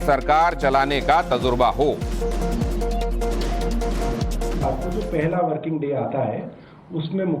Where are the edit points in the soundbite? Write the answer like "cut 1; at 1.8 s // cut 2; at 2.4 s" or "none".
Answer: cut 1; at 5.6 s